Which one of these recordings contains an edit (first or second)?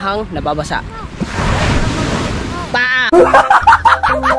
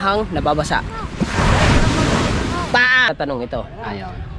second